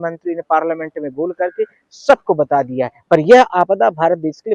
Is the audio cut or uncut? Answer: uncut